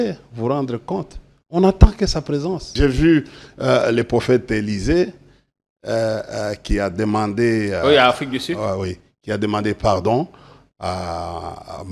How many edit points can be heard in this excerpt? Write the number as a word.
one